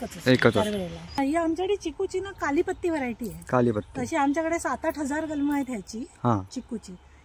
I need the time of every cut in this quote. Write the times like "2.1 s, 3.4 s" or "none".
1.2 s